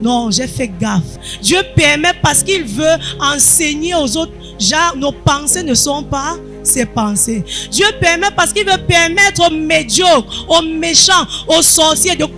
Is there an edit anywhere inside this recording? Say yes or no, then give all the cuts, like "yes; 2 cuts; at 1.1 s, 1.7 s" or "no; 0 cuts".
yes; 1 cut; at 1.3 s